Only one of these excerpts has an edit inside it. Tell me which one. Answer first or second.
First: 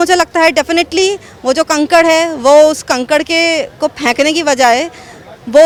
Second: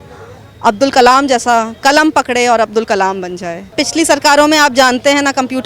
second